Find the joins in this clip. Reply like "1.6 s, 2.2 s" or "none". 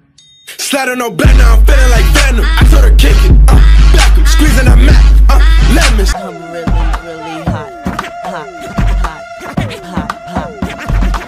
5.9 s